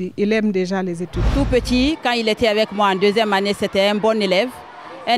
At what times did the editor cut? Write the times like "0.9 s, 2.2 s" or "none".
1.2 s